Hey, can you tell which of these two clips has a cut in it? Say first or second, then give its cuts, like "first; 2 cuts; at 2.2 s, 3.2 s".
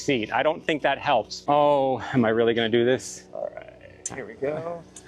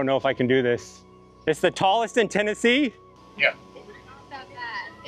first; 1 cut; at 1.3 s